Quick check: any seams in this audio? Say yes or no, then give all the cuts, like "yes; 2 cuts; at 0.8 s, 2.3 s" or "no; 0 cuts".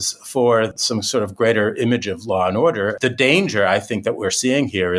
yes; 1 cut; at 3.0 s